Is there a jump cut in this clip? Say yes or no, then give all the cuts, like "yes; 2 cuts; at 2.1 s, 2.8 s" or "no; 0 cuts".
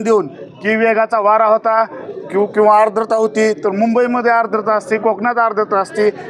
no; 0 cuts